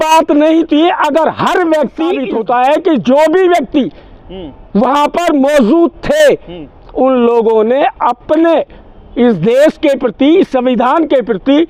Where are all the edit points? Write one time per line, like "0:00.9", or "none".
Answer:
0:02.2